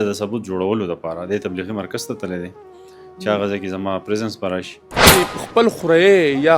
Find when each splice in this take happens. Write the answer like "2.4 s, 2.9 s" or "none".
5.1 s